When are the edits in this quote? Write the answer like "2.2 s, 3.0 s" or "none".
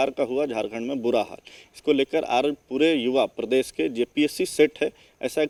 none